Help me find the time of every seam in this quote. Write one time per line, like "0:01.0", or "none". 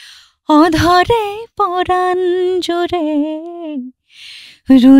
none